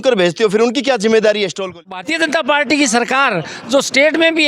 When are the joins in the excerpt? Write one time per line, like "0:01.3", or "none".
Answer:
0:01.9